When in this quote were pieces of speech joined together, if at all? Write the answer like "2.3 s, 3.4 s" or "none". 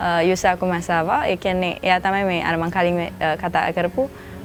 none